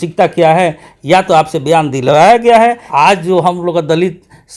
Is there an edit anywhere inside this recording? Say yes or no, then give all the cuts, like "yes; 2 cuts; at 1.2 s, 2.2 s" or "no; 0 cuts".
yes; 1 cut; at 2.8 s